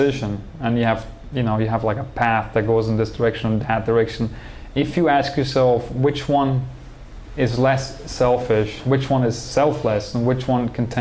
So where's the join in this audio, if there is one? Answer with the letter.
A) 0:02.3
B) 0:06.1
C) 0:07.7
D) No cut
D